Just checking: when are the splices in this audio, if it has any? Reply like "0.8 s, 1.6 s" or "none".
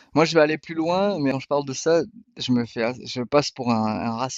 1.3 s